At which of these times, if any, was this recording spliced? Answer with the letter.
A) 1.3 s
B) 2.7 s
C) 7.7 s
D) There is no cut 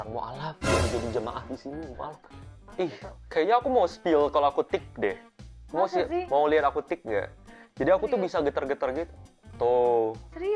B